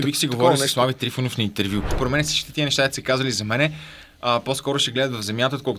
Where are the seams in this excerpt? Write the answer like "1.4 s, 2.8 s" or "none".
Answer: 1.9 s